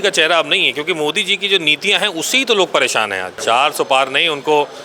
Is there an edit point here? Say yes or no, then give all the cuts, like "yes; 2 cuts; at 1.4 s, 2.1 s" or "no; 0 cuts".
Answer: yes; 1 cut; at 3.3 s